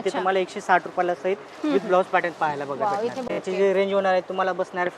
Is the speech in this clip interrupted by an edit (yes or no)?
yes